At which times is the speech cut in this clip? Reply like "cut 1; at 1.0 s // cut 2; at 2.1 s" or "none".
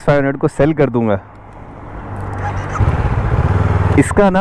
none